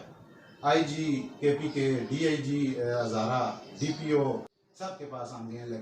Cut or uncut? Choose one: cut